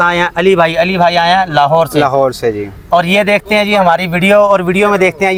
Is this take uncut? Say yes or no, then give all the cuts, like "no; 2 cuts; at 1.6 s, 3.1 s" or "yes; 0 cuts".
yes; 0 cuts